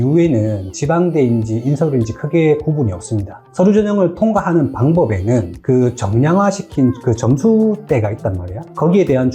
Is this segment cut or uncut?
cut